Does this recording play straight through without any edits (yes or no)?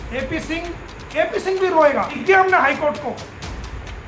no